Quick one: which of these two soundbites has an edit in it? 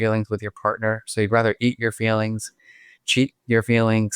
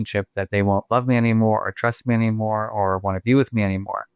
first; 1 cut; at 3.0 s

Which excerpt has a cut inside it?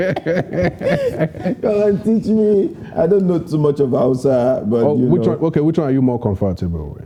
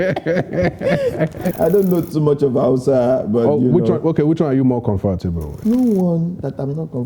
second; 2 cuts; at 1.5 s, 5.6 s

